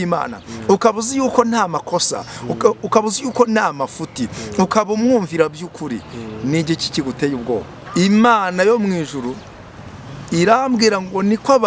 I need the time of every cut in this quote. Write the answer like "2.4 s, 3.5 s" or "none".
7.8 s